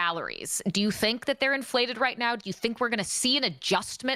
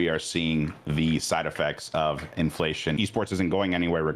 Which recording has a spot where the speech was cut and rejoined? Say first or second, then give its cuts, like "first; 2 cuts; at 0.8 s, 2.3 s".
second; 1 cut; at 3.0 s